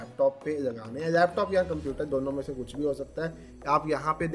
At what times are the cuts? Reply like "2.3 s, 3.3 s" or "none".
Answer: 3.4 s